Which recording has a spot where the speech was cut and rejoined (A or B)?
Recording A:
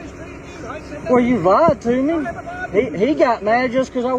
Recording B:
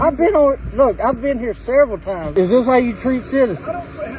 B